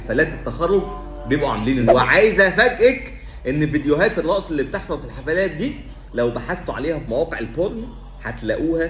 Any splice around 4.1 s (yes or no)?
no